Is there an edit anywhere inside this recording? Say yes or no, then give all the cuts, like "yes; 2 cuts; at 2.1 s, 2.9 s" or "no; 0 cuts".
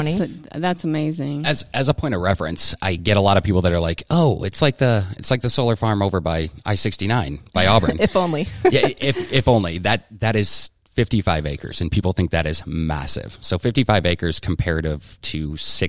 no; 0 cuts